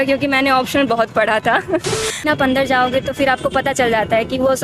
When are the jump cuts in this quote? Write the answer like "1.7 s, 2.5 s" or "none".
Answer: 2.2 s